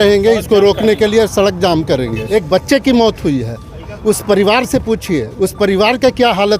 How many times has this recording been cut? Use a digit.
1